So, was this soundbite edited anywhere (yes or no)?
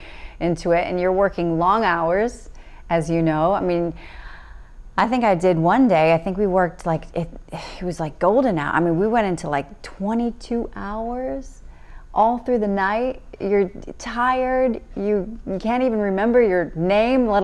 no